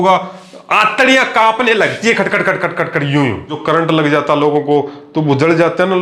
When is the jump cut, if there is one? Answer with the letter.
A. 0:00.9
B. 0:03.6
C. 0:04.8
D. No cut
B